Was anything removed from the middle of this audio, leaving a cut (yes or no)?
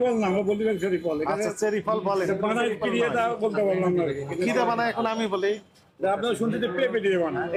no